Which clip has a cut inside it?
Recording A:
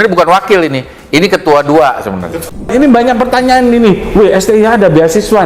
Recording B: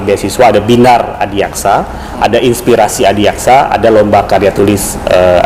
A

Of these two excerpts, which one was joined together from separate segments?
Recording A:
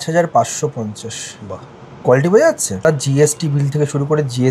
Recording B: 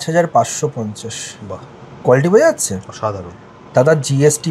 A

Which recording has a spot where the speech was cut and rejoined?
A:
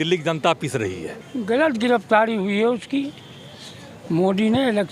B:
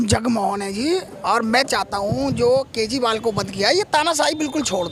A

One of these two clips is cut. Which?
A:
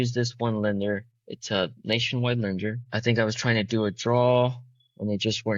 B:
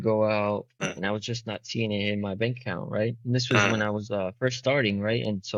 A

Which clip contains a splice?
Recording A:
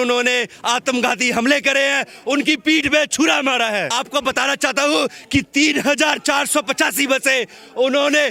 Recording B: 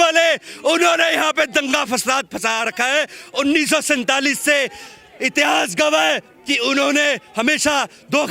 A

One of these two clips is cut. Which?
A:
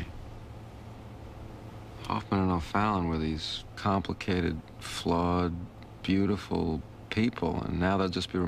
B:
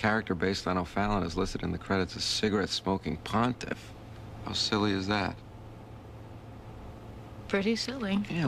A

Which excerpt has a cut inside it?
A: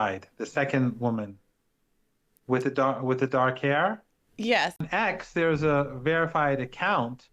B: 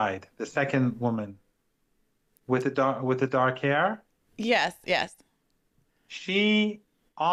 A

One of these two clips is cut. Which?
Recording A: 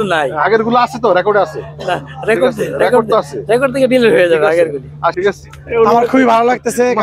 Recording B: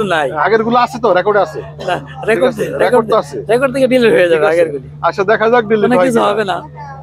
A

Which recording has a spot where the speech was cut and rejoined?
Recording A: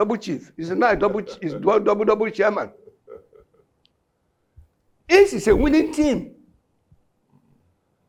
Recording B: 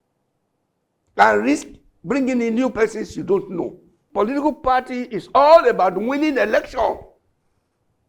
B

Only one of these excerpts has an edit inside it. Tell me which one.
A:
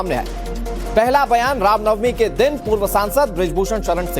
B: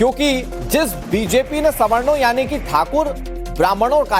A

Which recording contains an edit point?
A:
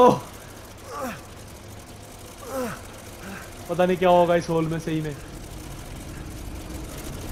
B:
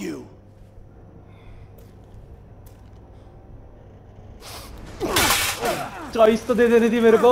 B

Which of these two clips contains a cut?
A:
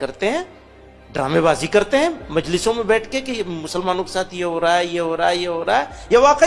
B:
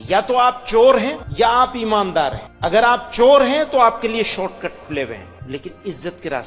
B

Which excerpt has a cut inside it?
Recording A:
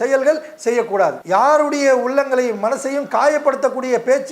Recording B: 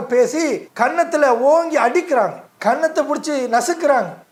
A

